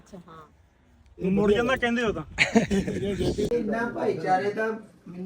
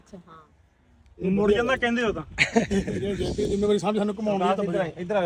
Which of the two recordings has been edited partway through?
first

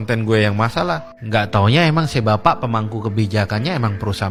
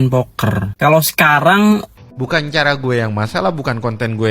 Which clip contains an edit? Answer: second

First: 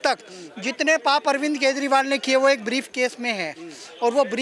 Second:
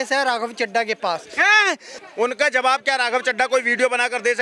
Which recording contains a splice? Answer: second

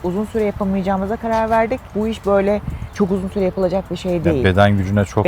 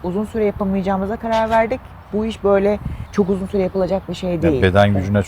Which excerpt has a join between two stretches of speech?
first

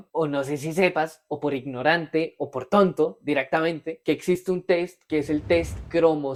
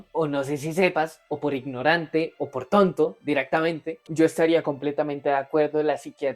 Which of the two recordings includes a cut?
second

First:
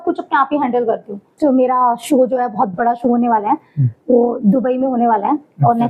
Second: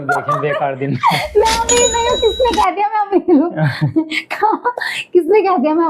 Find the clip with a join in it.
first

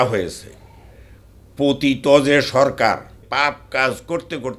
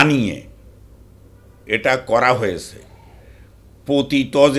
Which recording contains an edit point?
first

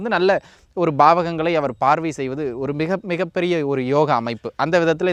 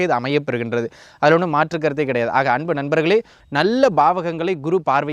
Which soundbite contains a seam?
second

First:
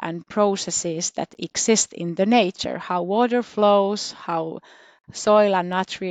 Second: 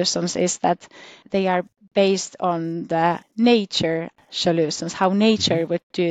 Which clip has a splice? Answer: second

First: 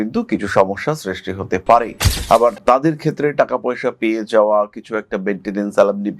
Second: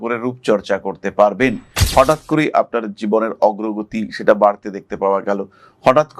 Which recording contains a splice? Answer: second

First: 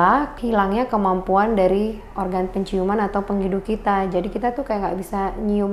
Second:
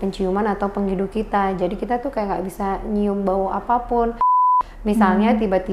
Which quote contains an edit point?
second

